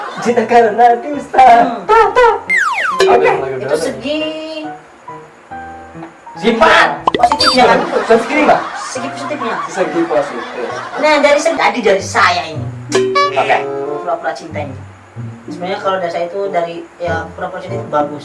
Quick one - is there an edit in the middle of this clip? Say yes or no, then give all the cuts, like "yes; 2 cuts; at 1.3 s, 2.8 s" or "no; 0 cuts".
yes; 1 cut; at 11.6 s